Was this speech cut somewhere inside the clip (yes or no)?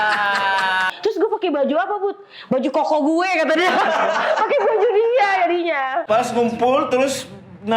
yes